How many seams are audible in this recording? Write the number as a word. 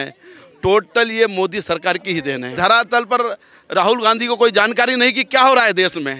one